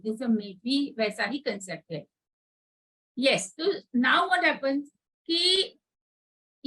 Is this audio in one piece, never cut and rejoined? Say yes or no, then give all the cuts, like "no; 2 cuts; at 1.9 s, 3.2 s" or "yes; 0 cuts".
yes; 0 cuts